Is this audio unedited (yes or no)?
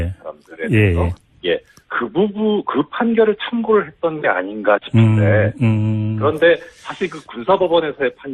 yes